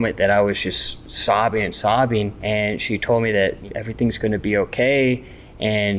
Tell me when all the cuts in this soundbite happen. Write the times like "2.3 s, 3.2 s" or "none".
2.4 s, 3.6 s